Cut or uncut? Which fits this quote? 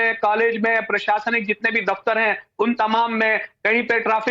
cut